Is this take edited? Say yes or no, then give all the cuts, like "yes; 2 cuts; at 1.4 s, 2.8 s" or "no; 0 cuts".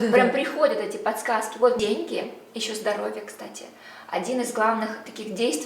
yes; 1 cut; at 1.8 s